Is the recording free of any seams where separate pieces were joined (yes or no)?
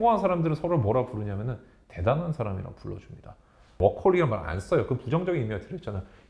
no